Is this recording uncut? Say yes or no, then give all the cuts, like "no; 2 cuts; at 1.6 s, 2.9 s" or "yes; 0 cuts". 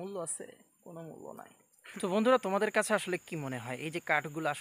no; 1 cut; at 1.8 s